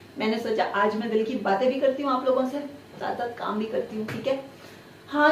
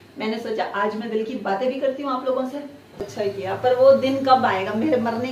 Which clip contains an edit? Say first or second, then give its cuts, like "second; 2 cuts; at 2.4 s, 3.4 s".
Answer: second; 1 cut; at 3.0 s